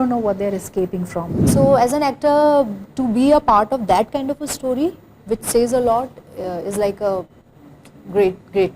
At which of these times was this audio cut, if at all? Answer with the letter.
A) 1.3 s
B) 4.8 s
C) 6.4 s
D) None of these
A